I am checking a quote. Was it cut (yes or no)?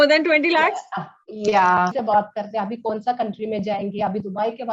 yes